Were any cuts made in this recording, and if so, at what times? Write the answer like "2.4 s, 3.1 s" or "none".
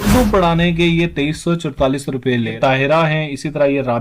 2.5 s